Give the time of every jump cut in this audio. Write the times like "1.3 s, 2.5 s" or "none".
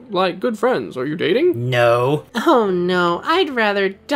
2.3 s